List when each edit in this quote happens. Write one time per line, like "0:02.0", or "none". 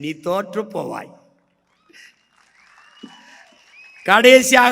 none